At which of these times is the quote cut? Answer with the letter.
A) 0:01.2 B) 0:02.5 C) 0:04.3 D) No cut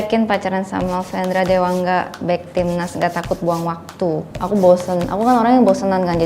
C